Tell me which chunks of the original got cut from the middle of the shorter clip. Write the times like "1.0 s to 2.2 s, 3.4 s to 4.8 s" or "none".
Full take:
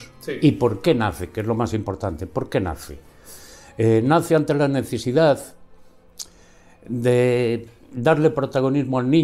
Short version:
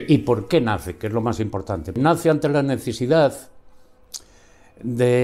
2.3 s to 4.0 s